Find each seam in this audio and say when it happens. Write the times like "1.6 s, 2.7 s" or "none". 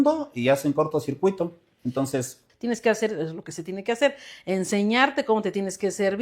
2.5 s